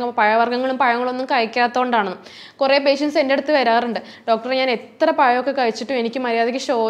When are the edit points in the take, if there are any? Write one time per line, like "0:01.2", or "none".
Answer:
none